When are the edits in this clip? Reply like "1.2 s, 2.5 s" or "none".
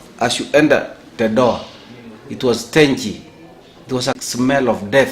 4.2 s